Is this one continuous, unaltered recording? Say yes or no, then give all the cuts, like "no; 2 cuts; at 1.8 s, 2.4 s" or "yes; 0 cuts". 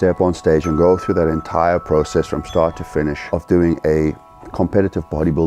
yes; 0 cuts